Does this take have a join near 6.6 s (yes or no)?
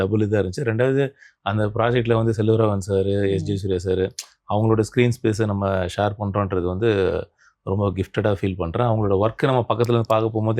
no